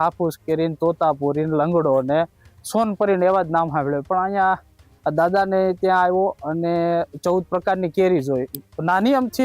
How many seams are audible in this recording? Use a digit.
0